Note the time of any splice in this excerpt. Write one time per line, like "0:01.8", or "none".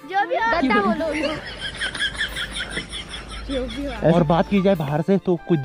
0:04.0

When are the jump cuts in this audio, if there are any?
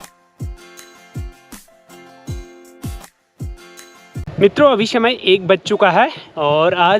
0:04.5

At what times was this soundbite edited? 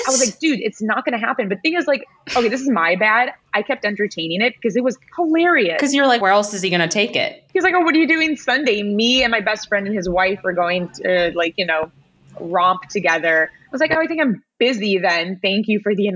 0:07.3

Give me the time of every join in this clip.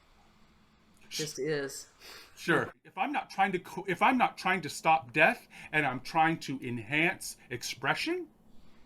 0:02.9

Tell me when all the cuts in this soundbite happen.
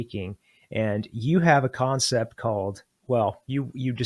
0:02.9

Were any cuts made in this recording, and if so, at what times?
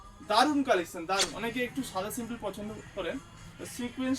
0:01.3

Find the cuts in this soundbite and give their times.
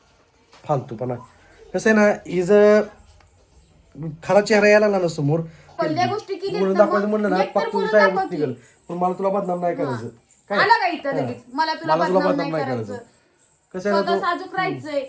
0:05.7

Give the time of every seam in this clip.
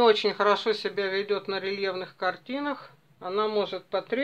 0:03.1

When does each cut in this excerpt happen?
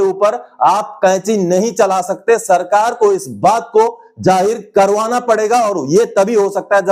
none

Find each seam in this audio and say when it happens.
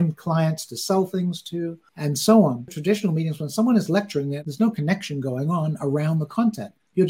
0:02.7
0:04.4

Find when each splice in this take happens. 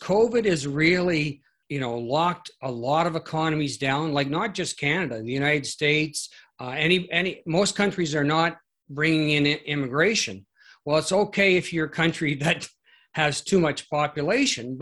0:01.5

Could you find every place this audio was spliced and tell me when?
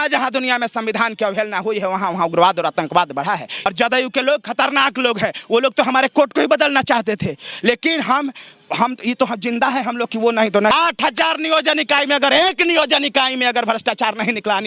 0:03.5
0:10.7

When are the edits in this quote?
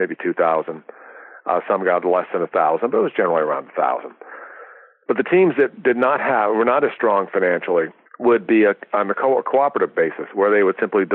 0:08.0

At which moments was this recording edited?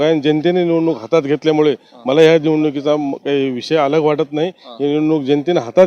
none

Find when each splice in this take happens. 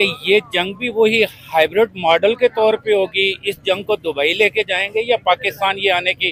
none

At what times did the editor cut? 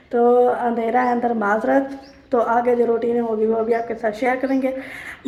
none

